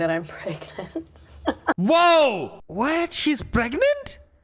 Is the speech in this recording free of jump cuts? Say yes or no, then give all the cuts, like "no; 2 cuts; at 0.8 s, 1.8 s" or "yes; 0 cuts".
no; 1 cut; at 2.6 s